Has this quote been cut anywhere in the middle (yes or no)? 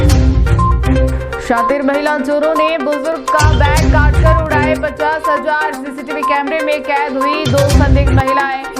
yes